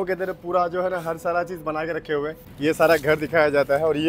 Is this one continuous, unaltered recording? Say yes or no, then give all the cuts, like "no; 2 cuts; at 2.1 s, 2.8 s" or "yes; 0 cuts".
no; 1 cut; at 2.4 s